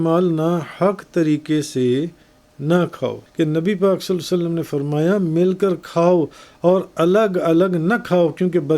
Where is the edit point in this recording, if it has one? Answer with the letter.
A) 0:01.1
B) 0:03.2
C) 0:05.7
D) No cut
B